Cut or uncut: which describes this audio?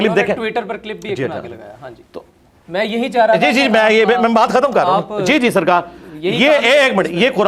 uncut